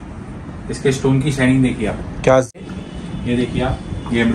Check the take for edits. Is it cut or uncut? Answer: cut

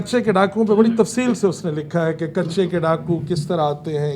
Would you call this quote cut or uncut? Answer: uncut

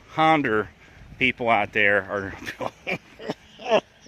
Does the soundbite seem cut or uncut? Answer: uncut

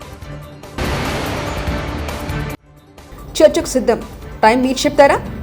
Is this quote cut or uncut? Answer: cut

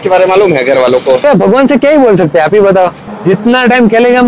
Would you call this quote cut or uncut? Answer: cut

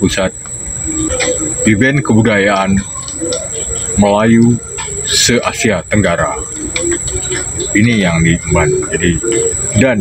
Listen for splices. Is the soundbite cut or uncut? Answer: uncut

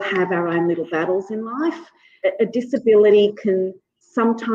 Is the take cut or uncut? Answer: cut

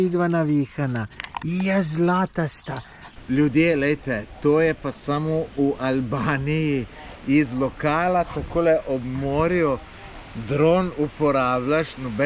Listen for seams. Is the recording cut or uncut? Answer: cut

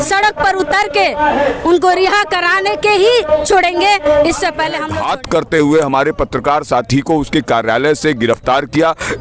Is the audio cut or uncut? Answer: cut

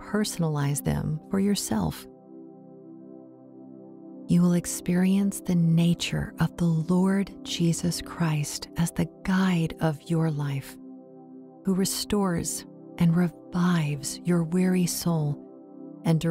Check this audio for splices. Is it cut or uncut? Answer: cut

